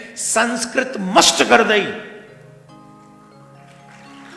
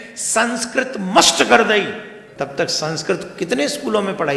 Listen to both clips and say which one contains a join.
second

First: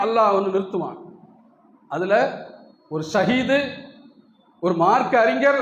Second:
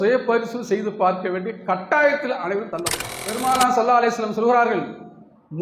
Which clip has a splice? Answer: second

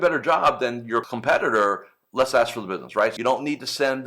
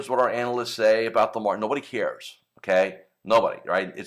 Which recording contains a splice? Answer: first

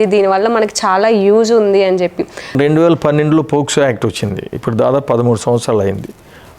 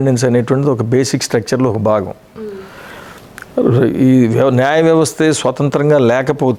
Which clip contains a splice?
first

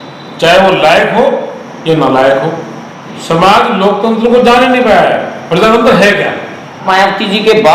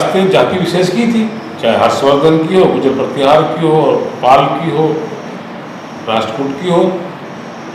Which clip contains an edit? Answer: first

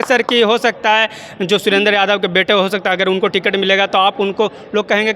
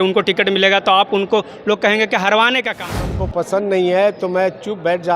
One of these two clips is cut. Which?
second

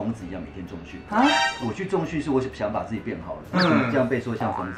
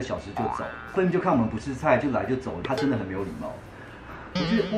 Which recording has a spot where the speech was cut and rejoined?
second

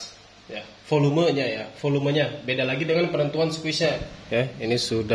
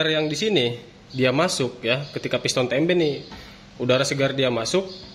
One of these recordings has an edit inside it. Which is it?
first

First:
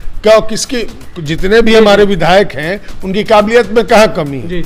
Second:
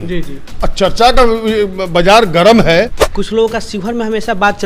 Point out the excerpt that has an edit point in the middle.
second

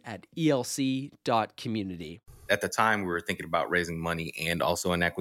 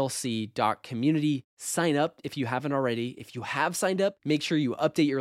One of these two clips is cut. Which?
first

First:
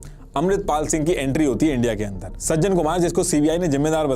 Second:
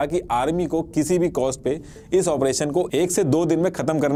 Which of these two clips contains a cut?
first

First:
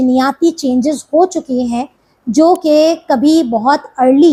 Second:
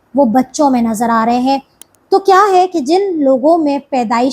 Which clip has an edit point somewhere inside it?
second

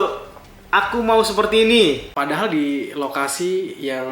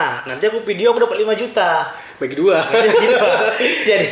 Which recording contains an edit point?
first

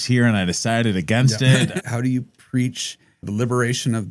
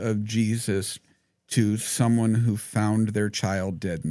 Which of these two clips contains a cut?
first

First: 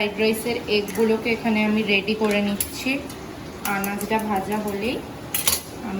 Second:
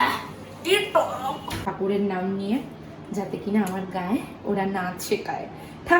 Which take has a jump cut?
second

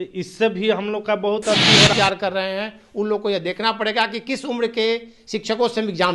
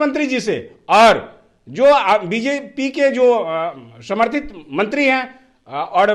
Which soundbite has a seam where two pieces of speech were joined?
first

